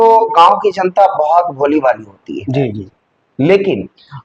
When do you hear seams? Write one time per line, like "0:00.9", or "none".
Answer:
none